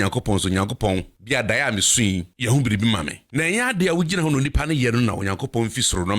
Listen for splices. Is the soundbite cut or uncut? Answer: cut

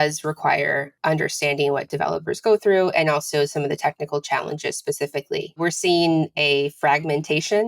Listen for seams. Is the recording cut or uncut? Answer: cut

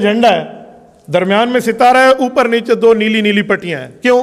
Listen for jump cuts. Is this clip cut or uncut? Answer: uncut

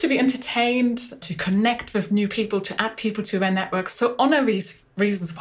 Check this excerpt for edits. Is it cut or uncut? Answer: cut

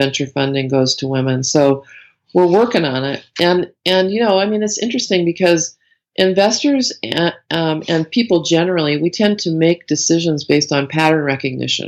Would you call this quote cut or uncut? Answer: uncut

